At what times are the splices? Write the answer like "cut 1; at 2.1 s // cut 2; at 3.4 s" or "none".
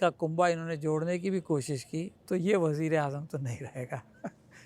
cut 1; at 2.2 s